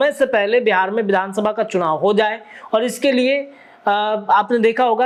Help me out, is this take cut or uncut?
uncut